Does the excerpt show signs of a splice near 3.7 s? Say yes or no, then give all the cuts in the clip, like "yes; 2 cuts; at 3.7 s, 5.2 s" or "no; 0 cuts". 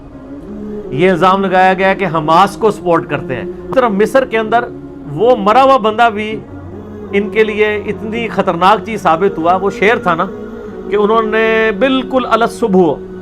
yes; 1 cut; at 3.7 s